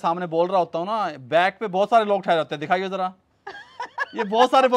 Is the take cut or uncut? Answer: uncut